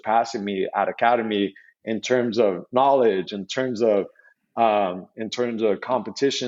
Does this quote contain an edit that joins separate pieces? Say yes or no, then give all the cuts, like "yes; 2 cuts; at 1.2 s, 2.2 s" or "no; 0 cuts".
no; 0 cuts